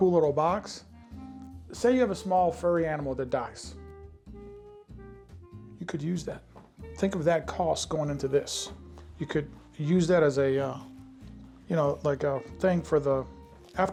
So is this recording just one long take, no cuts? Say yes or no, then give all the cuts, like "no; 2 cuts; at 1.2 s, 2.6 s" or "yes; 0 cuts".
yes; 0 cuts